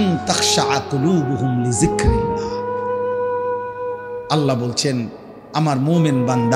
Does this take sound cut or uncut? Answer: cut